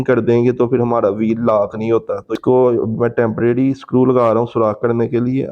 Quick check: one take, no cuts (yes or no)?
no